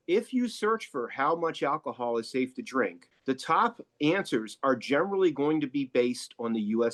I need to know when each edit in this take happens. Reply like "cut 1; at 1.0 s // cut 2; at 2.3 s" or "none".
none

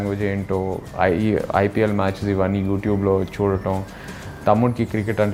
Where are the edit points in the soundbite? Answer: none

